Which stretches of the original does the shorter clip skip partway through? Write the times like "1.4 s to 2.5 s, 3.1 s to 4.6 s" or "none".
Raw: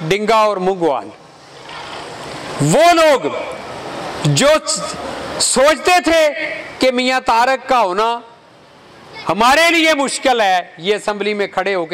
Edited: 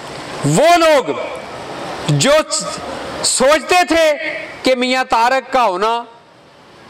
none

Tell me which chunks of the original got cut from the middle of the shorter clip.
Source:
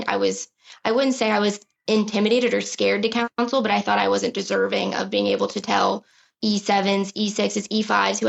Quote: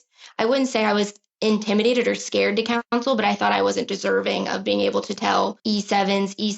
6.0 s to 6.3 s

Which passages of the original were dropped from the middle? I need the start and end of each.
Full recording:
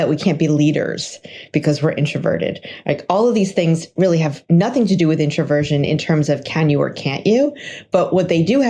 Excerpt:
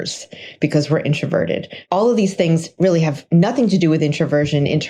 2.8 s to 3.0 s

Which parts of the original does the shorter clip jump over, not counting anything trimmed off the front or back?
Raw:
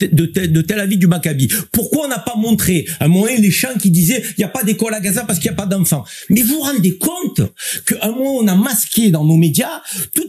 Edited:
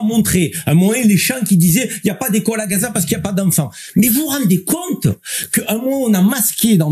none

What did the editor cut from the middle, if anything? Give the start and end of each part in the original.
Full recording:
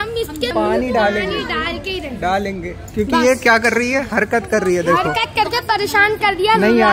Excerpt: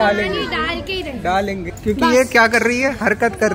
2.7 s to 2.8 s

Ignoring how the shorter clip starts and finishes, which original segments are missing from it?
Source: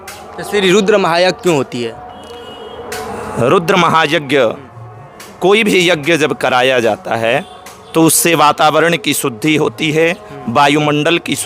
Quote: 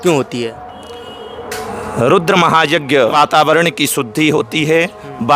4.5 s to 8.4 s

